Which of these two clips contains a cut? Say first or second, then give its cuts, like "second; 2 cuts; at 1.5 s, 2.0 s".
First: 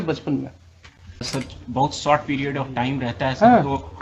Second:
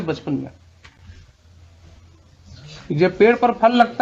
first; 1 cut; at 1.3 s